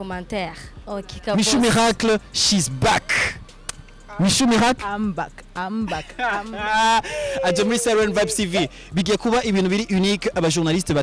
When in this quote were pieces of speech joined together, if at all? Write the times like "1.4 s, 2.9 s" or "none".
none